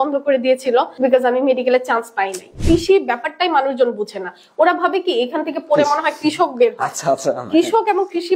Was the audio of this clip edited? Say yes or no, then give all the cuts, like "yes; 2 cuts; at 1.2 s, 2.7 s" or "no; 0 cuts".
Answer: yes; 2 cuts; at 0.9 s, 2.6 s